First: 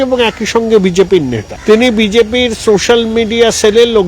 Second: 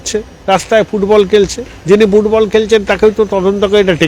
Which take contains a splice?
first; 1 cut; at 1.5 s

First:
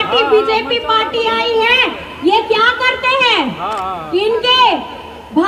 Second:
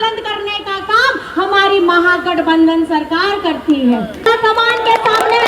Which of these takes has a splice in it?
second; 1 cut; at 4.3 s

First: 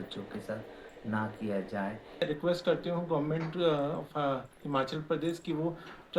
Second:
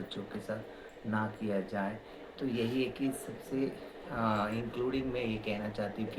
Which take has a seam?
first; 1 cut; at 2.2 s

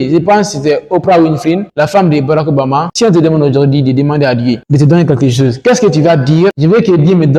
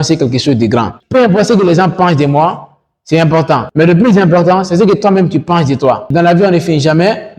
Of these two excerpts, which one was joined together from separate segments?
second; 2 cuts; at 1.0 s, 6.0 s

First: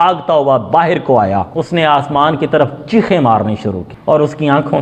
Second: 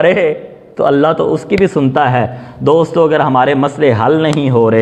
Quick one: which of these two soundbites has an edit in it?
first; 2 cuts; at 1.6 s, 3.9 s

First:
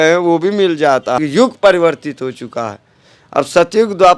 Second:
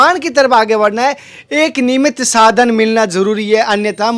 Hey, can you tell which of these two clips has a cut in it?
first; 1 cut; at 1.2 s

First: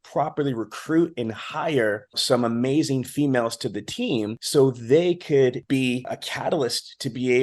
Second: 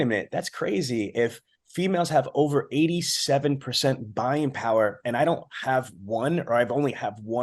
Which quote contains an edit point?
first; 3 cuts; at 2.2 s, 4.4 s, 5.7 s

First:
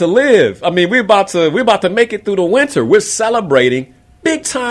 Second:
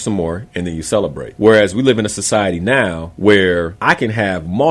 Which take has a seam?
second; 3 cuts; at 1.2 s, 3.0 s, 3.7 s

